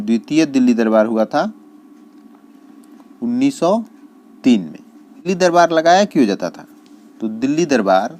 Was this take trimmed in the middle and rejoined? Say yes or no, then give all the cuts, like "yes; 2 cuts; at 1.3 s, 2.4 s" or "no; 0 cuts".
yes; 1 cut; at 5.3 s